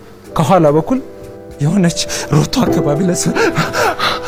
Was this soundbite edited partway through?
no; 0 cuts

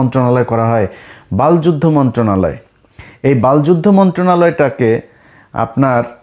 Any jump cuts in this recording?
no; 0 cuts

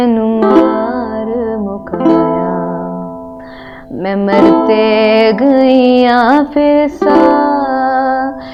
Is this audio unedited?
yes; 0 cuts

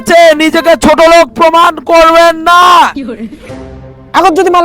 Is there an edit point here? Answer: yes; 1 cut; at 3.5 s

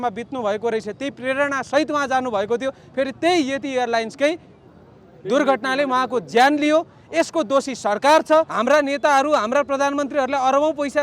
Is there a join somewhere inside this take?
yes; 1 cut; at 8.5 s

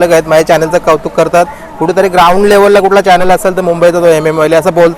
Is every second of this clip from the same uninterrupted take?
yes; 0 cuts

